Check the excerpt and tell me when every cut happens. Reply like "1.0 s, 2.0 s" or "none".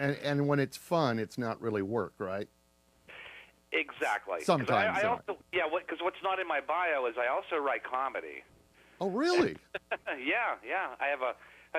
9.6 s